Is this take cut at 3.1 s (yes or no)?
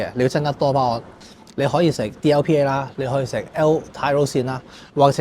no